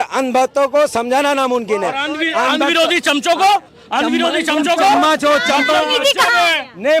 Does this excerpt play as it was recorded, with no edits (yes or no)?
yes